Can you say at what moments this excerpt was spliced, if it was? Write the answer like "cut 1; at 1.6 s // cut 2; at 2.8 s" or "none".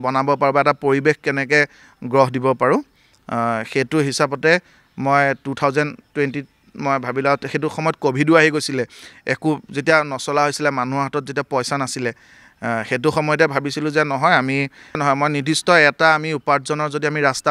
cut 1; at 15.0 s